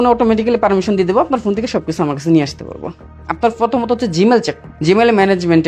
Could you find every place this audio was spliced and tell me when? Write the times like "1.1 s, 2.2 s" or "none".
3.3 s, 4.6 s

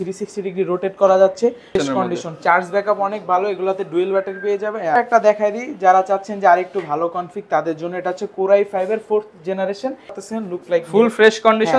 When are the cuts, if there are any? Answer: 1.8 s, 5.0 s, 10.2 s

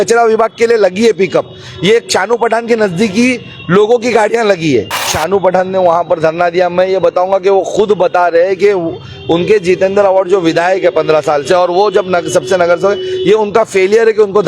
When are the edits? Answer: 5.2 s

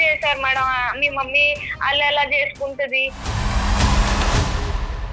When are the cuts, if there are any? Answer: 3.2 s

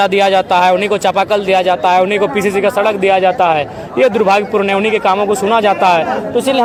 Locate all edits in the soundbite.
none

